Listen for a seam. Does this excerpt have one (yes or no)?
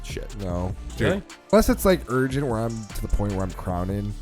yes